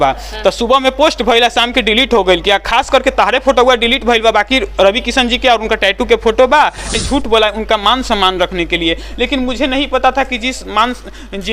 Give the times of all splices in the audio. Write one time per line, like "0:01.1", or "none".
0:06.9